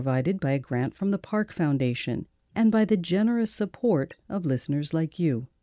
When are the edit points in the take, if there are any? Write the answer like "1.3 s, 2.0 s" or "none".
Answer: 2.3 s